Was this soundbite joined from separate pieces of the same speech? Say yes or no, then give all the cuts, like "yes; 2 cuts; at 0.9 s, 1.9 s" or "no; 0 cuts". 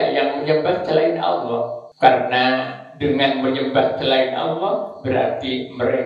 yes; 1 cut; at 1.8 s